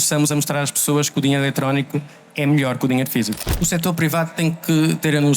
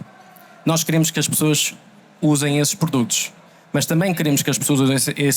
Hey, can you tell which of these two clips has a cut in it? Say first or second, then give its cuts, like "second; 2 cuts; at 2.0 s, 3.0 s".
first; 1 cut; at 3.4 s